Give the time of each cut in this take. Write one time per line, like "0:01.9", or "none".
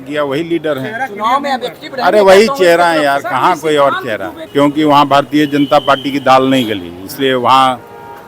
0:04.3